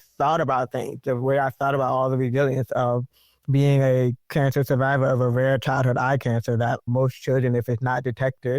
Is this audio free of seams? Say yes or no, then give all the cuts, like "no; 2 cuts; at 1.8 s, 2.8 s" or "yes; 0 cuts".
no; 2 cuts; at 4.2 s, 6.9 s